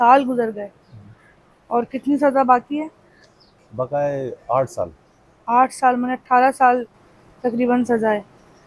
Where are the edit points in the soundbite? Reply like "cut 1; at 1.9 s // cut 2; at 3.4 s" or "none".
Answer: none